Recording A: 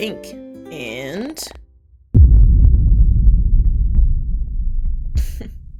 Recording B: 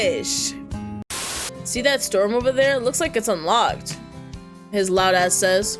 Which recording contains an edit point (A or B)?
B